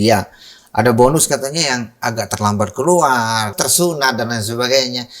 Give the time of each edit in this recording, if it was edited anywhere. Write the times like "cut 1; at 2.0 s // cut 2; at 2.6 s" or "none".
cut 1; at 3.5 s